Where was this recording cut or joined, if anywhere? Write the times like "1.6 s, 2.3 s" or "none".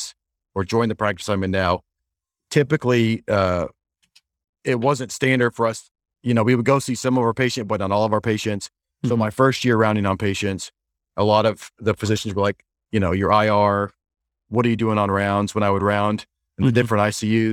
none

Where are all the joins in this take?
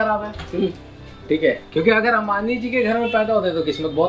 none

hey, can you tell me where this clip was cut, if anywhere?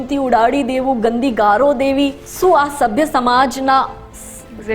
2.2 s

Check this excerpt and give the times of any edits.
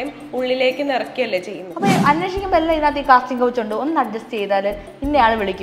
1.6 s

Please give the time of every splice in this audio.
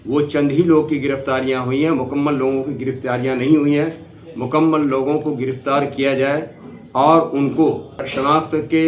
8.0 s

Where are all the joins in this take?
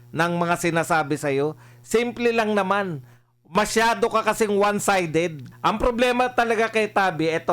5.4 s

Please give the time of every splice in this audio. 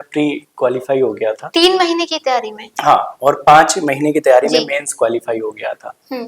none

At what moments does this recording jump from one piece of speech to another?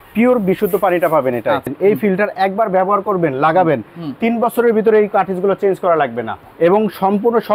1.7 s, 6.4 s

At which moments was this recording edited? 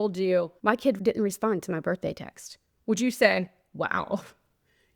0.9 s

